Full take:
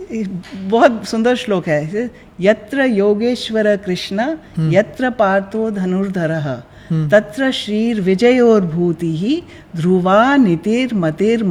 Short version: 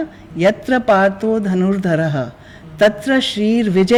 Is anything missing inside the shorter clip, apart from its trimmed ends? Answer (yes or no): no